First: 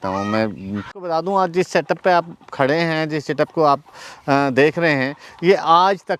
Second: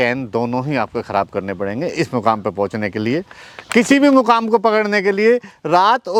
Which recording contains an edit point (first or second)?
first